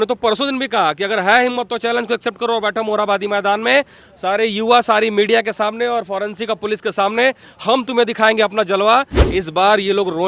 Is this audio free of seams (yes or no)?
no